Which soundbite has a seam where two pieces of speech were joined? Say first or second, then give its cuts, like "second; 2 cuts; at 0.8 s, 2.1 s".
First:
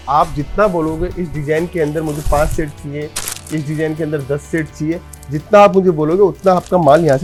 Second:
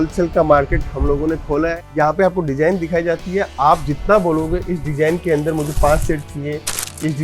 second; 1 cut; at 1.8 s